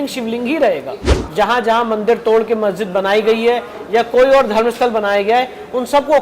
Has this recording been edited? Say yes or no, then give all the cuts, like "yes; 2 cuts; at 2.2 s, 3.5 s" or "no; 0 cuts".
yes; 1 cut; at 1.1 s